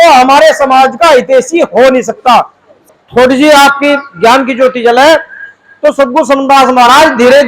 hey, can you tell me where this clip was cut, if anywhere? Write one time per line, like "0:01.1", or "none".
0:02.8